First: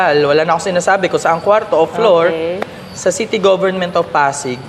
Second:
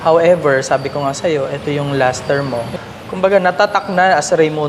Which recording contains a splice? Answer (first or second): second